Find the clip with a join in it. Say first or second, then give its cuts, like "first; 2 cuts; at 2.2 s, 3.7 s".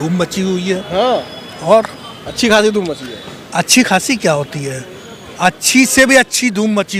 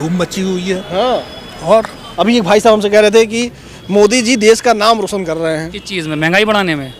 second; 1 cut; at 2.0 s